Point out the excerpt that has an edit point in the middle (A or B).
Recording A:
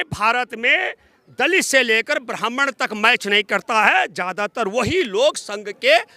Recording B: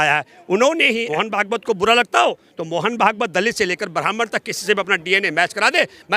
B